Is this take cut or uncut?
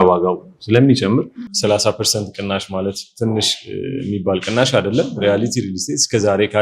cut